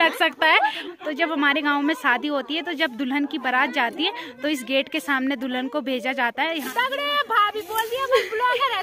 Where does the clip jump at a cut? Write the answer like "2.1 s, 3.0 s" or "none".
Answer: 0.8 s, 6.6 s